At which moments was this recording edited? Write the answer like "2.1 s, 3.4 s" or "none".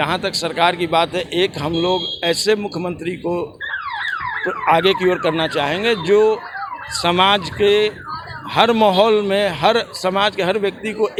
none